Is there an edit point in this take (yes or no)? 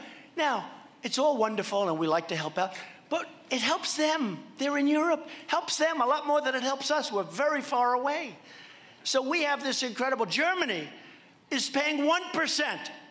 yes